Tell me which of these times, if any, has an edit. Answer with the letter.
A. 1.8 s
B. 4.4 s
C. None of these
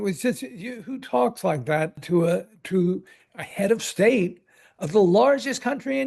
C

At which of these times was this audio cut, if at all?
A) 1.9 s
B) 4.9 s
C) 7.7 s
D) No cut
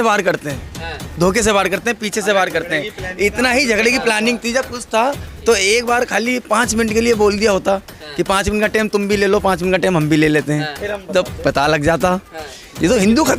D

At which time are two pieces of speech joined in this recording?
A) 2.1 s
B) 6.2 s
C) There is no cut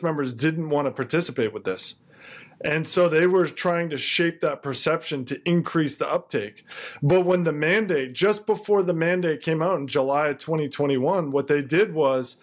C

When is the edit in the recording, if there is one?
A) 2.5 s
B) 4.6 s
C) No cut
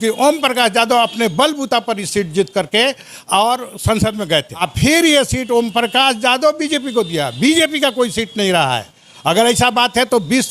B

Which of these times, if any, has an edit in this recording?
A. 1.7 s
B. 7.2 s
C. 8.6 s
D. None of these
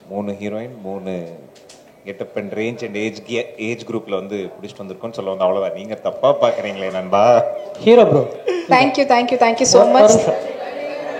D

